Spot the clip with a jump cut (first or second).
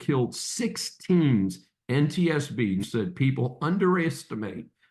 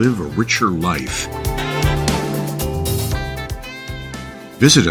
first